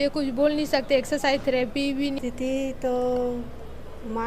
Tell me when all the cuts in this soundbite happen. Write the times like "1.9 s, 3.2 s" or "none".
2.2 s